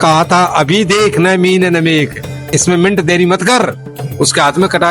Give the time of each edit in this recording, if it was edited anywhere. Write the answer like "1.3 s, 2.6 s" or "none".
2.5 s

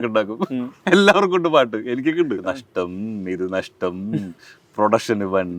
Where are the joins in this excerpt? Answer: 2.4 s

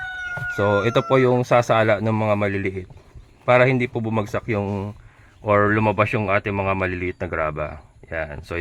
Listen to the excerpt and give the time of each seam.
none

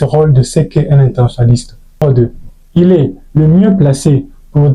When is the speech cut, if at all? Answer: 2.0 s

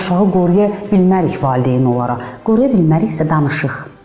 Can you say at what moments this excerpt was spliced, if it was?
none

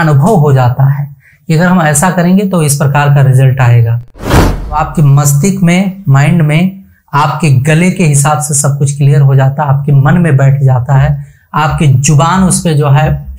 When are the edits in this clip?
4.4 s

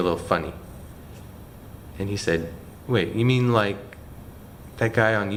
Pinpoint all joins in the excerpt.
none

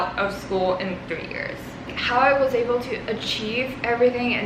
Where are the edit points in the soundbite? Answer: none

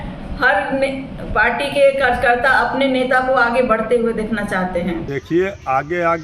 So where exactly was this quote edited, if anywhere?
5.1 s

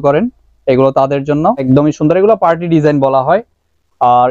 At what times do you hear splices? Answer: 1.7 s

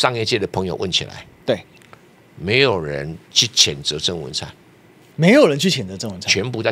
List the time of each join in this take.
none

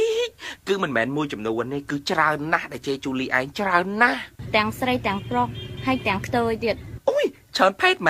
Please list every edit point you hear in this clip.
1.9 s

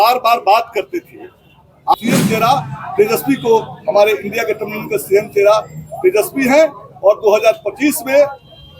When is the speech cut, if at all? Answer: 1.9 s

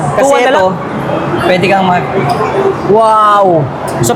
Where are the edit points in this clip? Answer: none

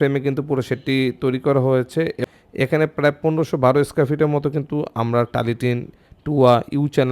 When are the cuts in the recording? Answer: 2.2 s

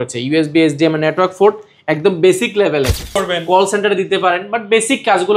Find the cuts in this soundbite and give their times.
3.2 s

